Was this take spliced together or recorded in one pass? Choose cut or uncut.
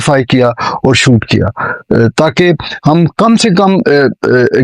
uncut